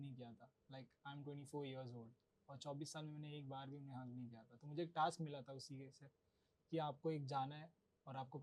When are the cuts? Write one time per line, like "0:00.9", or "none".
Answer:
none